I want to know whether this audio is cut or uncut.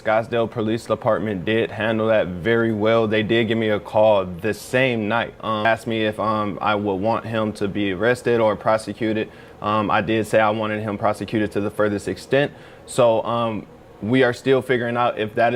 uncut